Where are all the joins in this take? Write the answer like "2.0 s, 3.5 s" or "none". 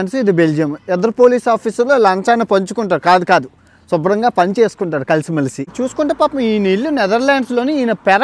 5.7 s